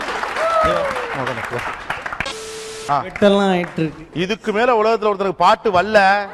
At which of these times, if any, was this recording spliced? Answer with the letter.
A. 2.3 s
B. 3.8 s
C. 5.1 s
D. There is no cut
A